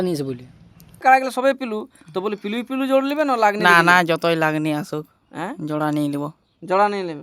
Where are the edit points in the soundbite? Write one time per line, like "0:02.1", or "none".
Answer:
0:01.0